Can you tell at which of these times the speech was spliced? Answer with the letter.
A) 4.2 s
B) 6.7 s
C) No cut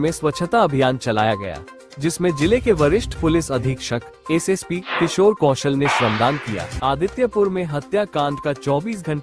B